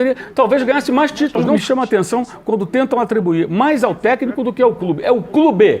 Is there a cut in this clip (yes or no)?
yes